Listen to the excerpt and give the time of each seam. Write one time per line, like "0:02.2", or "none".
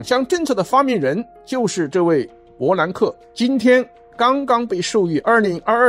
none